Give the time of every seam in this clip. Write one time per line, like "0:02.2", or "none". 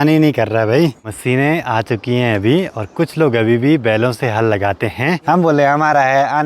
0:01.0
0:05.2